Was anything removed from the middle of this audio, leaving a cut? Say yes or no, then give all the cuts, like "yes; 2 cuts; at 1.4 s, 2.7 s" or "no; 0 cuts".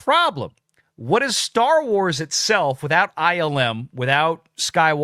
no; 0 cuts